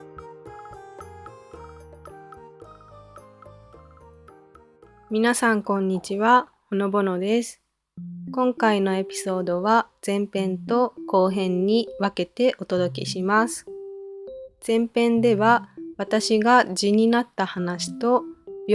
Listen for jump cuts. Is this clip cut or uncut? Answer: cut